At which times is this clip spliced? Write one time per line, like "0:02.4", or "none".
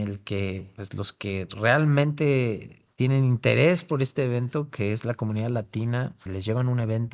0:06.2